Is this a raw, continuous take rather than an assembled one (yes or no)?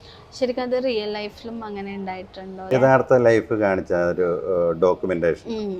no